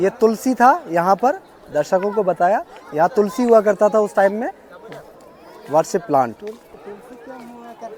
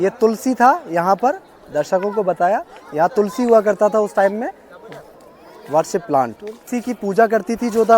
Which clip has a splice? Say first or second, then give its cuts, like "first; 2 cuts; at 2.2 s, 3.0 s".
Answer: second; 1 cut; at 6.6 s